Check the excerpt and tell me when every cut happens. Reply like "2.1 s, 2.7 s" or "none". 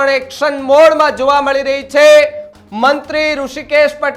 2.5 s